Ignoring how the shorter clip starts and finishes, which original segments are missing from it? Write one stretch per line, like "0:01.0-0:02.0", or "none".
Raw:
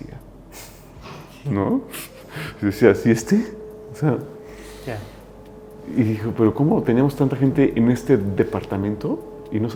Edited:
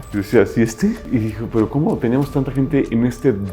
0:03.5-0:05.9